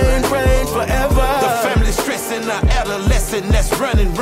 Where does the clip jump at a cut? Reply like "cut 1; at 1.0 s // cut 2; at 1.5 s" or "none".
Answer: none